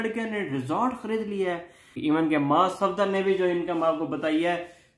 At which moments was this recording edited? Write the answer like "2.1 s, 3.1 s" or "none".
1.9 s